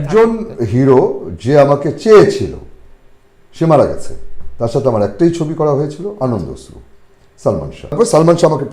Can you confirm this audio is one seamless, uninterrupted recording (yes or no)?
no